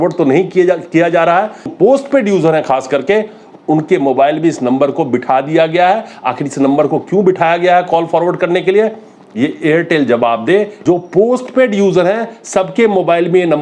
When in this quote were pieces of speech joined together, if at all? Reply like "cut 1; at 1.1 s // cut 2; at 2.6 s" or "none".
cut 1; at 1.7 s // cut 2; at 10.7 s